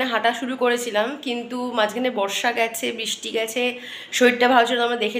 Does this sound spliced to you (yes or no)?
no